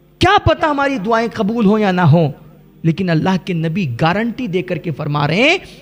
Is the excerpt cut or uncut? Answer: uncut